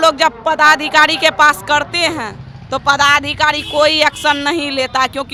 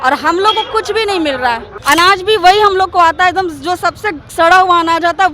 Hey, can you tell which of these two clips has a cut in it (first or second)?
second